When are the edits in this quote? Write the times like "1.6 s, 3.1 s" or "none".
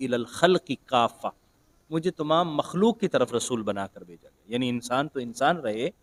none